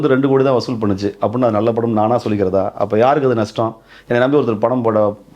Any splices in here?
no; 0 cuts

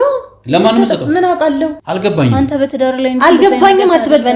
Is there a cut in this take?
yes; 1 cut; at 1.8 s

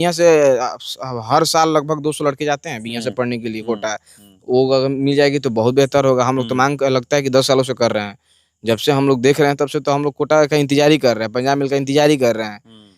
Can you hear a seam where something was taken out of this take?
no; 0 cuts

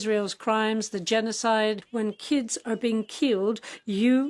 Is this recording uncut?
no; 1 cut; at 1.9 s

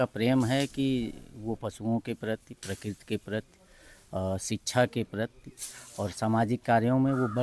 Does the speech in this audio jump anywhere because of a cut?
no; 0 cuts

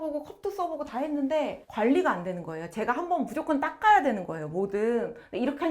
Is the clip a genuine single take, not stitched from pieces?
no; 1 cut; at 1.6 s

